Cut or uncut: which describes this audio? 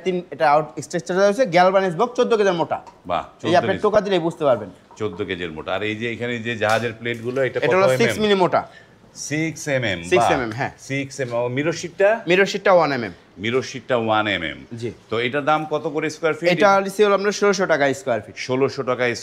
uncut